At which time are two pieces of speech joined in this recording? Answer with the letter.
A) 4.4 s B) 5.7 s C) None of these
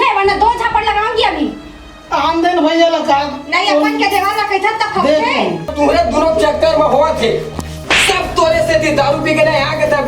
B